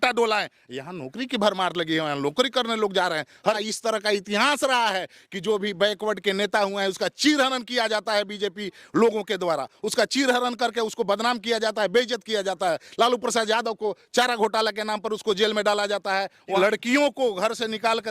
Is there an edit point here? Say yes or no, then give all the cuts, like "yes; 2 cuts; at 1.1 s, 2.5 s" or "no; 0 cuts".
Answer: yes; 2 cuts; at 3.6 s, 16.6 s